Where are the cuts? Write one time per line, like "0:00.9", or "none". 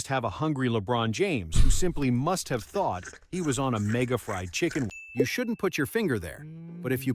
0:05.0